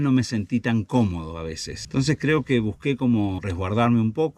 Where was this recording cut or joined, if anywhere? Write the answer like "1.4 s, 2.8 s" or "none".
none